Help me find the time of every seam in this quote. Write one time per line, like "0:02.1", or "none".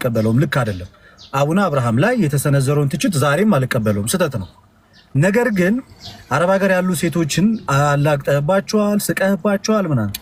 none